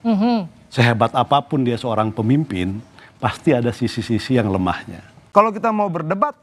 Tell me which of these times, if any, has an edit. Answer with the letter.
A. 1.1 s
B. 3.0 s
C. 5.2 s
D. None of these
C